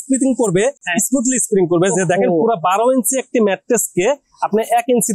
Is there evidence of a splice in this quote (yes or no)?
no